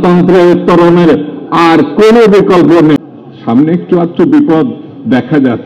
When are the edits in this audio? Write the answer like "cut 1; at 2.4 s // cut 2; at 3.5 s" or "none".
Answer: cut 1; at 3.0 s